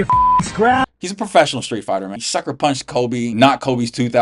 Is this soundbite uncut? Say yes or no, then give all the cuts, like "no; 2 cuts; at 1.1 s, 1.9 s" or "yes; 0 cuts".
no; 3 cuts; at 0.9 s, 2.2 s, 3.3 s